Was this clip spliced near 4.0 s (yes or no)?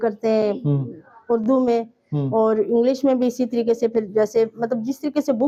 no